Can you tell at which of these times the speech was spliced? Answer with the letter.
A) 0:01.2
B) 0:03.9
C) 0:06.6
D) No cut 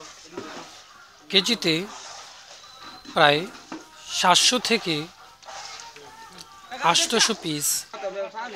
A